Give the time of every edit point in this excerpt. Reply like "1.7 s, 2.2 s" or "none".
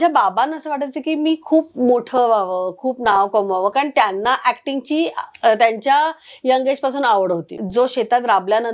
7.6 s